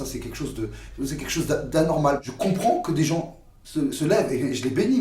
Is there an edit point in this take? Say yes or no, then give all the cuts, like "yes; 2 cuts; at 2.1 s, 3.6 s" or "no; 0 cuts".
yes; 1 cut; at 2.2 s